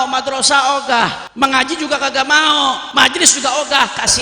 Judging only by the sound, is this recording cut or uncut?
cut